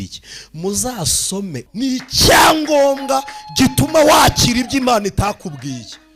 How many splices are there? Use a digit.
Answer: 1